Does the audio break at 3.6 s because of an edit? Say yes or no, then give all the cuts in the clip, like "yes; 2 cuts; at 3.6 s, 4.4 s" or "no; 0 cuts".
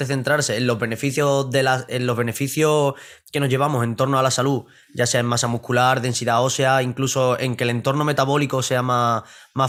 no; 0 cuts